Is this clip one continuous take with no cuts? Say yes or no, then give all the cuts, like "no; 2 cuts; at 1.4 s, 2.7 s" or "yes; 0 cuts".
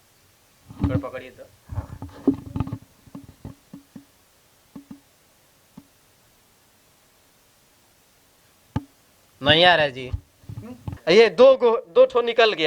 no; 1 cut; at 10.9 s